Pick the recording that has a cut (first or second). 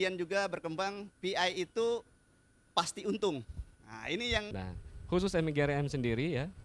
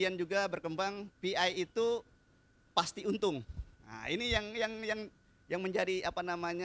first